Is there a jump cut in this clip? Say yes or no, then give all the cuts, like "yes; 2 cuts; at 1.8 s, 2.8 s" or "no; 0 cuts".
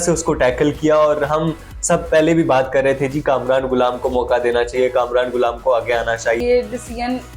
yes; 1 cut; at 6.4 s